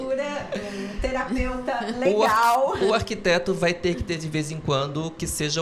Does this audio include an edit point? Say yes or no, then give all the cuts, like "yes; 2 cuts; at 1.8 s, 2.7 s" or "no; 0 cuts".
no; 0 cuts